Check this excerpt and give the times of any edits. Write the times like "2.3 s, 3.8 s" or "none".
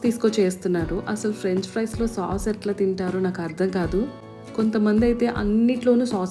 none